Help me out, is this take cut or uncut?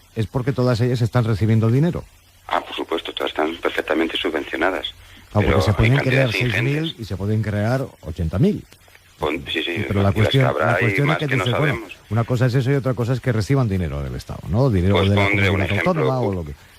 cut